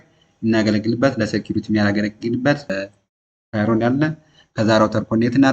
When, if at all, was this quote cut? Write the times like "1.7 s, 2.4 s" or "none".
2.7 s